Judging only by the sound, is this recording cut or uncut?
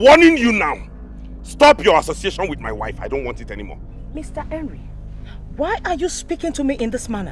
uncut